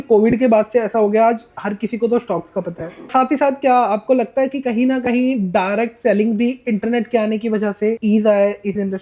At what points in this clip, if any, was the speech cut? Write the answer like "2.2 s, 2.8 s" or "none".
3.1 s, 8.0 s